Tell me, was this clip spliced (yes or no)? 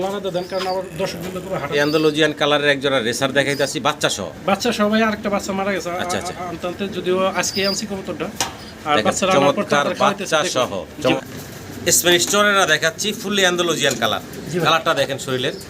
yes